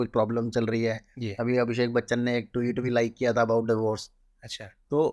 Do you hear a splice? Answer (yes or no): no